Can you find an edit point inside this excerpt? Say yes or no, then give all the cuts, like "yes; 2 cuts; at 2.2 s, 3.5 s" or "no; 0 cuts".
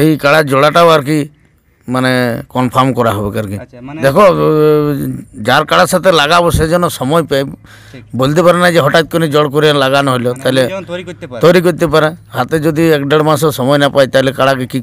yes; 1 cut; at 3.8 s